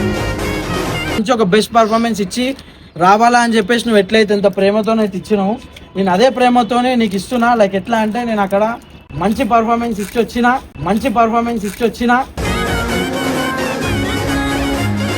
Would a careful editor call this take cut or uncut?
cut